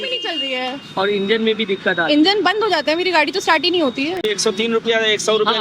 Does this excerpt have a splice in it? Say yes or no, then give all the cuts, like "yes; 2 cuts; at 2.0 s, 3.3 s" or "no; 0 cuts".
yes; 1 cut; at 4.3 s